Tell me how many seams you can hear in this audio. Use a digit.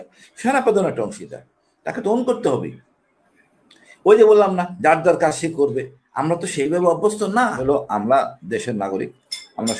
1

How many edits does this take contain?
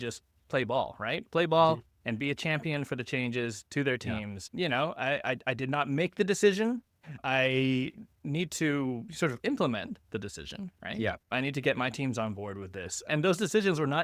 2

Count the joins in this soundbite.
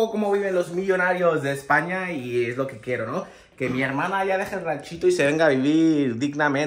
0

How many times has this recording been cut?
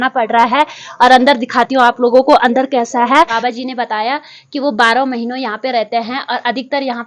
1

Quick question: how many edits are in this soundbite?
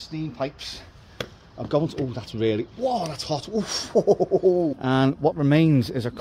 1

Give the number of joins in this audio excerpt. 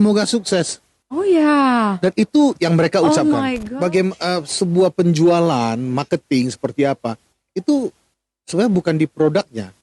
1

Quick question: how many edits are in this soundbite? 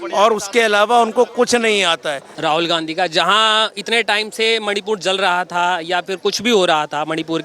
1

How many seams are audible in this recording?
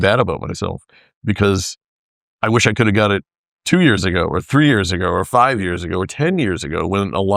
0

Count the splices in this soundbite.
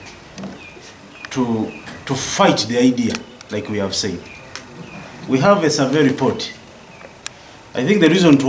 0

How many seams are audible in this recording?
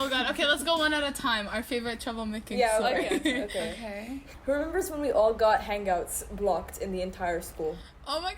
1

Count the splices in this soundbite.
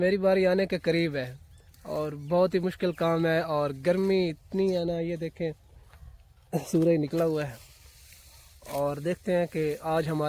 0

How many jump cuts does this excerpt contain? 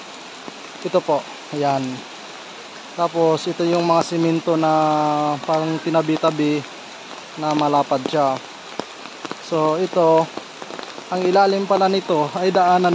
0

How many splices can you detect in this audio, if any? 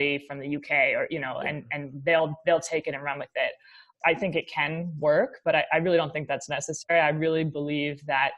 1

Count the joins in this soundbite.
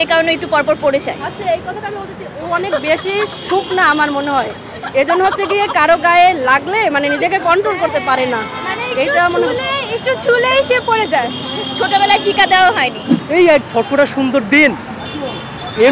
1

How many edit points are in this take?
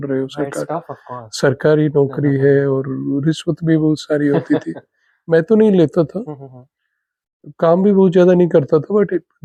0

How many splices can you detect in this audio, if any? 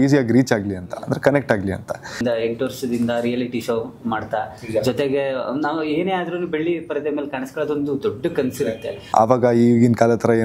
2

